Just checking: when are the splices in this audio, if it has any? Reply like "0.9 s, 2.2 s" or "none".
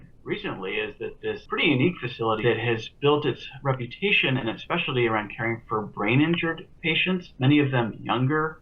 1.4 s, 2.4 s